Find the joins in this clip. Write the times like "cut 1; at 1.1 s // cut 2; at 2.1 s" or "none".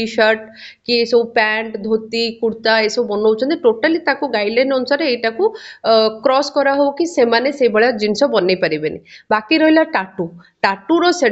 none